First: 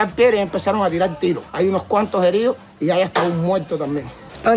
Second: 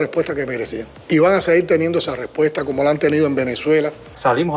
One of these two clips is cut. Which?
first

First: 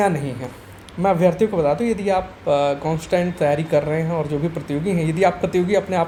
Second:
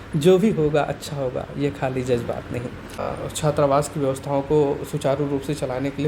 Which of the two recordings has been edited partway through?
second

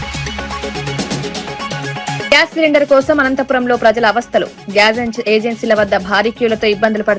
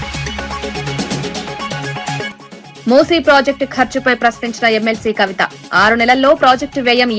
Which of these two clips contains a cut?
second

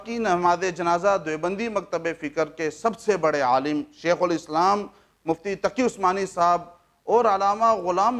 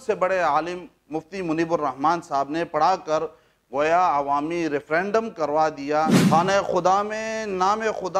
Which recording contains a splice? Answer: second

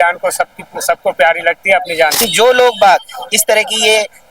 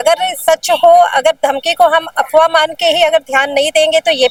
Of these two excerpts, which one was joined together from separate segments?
first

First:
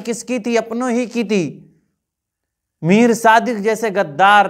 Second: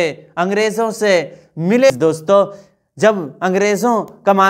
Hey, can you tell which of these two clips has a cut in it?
second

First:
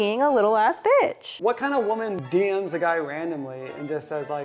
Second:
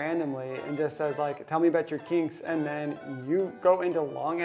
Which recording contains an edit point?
first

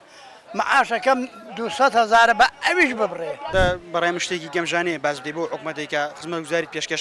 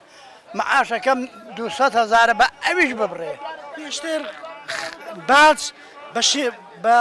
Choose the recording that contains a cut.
first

